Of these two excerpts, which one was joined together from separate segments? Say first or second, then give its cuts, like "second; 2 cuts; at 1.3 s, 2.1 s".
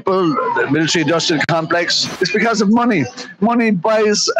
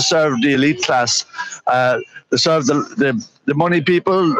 first; 1 cut; at 2.1 s